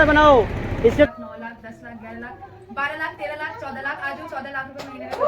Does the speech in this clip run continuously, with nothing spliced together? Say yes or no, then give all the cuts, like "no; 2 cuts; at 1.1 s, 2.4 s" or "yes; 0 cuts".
no; 1 cut; at 1.1 s